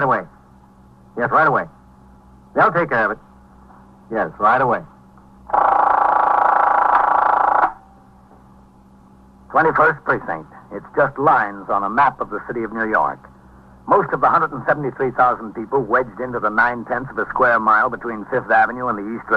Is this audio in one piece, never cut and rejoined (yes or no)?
yes